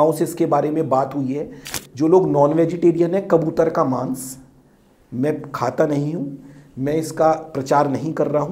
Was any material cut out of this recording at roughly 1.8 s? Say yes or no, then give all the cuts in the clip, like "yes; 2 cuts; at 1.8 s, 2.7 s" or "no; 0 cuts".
yes; 1 cut; at 1.8 s